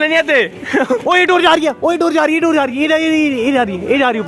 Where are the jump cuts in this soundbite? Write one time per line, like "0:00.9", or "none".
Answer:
0:01.0